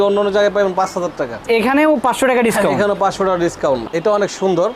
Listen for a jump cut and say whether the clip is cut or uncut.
cut